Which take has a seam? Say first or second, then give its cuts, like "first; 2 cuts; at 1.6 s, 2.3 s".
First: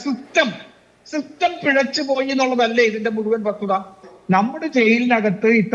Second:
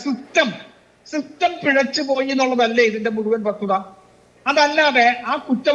first; 1 cut; at 4.1 s